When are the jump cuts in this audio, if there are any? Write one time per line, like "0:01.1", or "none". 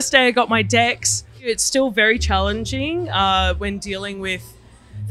0:01.3